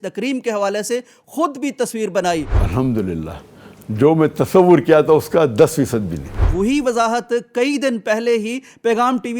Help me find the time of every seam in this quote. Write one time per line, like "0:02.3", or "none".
0:02.6
0:06.4